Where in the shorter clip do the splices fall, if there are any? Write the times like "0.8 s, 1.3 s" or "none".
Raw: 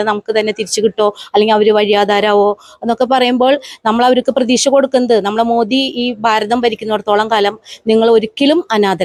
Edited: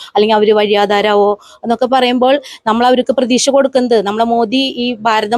none

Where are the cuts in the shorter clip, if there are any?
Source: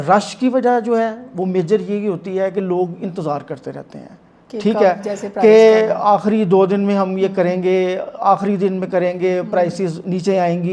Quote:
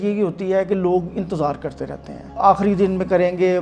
2.3 s

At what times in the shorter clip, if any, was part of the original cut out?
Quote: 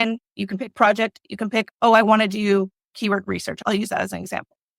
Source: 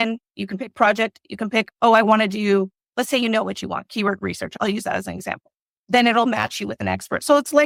3.1 s

